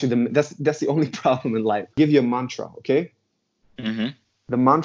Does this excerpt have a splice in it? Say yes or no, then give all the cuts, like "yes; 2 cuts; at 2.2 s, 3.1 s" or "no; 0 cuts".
yes; 1 cut; at 1.9 s